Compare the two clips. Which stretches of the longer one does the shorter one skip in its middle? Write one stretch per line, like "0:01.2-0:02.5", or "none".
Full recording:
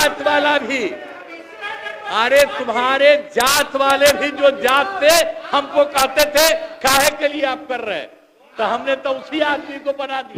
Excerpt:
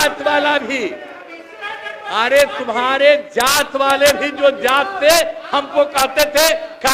none